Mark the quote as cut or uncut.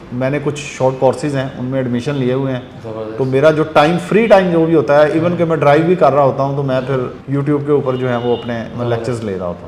cut